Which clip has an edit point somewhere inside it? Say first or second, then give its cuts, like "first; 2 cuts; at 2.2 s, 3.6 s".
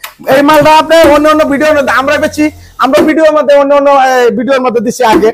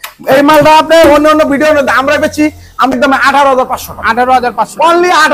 second; 1 cut; at 2.9 s